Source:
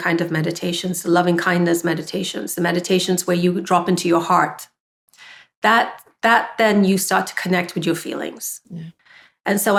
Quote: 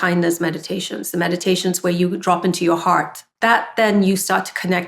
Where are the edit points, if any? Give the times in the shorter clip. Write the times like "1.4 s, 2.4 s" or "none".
3.2 s